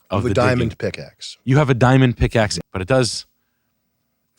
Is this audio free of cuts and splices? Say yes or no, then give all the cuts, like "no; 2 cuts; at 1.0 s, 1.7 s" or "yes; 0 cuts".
no; 1 cut; at 2.6 s